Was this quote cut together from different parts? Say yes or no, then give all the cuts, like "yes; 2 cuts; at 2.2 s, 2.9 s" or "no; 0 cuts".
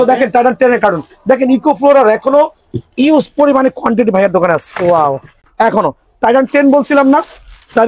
no; 0 cuts